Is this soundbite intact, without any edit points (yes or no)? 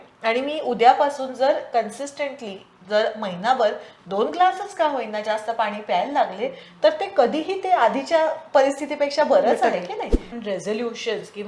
no